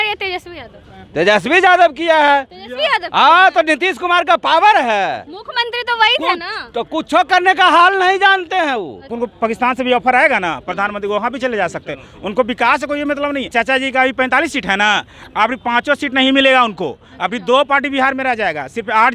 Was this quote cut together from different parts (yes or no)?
yes